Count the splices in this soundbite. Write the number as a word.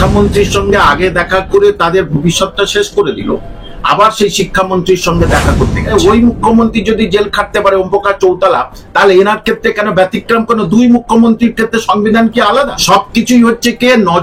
two